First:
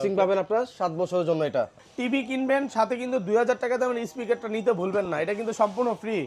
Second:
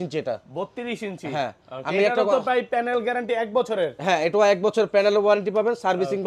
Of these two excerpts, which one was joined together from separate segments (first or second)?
first